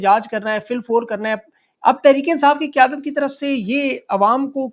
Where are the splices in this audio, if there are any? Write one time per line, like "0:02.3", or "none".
none